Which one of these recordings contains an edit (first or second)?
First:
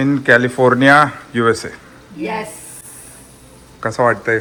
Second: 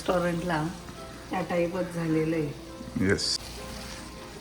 second